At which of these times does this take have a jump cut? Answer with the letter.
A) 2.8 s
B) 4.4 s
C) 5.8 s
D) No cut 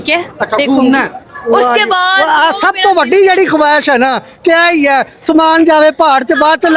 D